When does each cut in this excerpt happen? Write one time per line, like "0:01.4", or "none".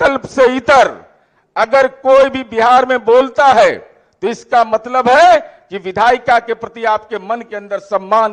none